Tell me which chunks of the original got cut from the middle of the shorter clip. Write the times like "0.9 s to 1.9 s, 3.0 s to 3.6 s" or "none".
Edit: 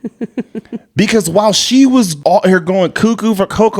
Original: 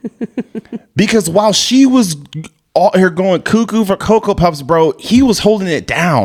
2.1 s to 2.6 s